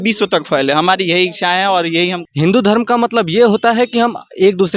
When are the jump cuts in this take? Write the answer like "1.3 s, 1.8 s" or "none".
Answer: 2.2 s

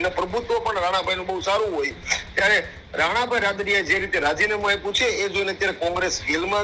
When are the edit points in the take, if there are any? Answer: none

